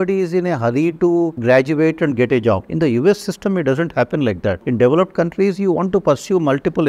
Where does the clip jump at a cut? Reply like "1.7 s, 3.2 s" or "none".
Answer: none